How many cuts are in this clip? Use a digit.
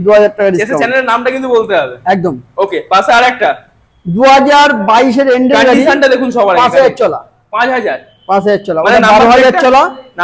0